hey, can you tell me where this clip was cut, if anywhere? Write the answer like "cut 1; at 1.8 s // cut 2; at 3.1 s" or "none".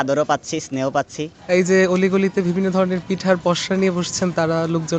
cut 1; at 1.3 s